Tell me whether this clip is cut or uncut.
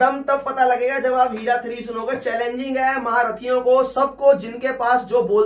uncut